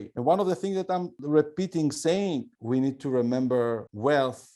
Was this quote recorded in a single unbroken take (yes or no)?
no